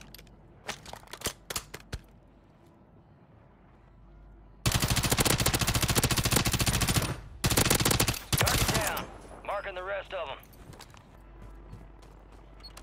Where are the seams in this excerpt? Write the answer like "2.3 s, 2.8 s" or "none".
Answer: 11.1 s